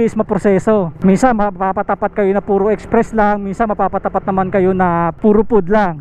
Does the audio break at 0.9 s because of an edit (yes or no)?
yes